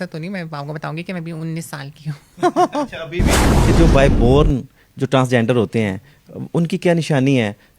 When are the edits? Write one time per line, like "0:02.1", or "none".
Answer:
0:03.5